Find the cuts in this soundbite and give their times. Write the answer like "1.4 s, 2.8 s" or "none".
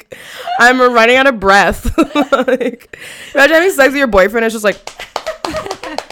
none